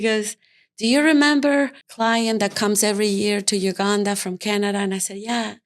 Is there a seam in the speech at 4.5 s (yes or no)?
no